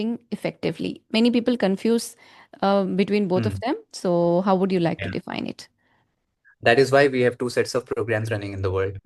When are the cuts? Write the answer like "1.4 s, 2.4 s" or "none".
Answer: none